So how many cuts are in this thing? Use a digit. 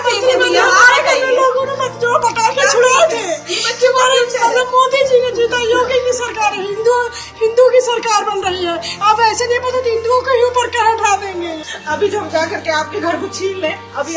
1